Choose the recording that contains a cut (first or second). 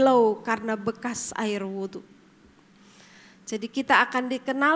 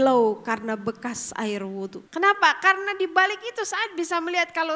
second